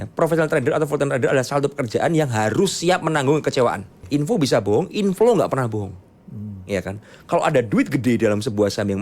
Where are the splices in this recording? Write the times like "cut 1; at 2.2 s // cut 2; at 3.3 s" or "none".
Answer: cut 1; at 4.0 s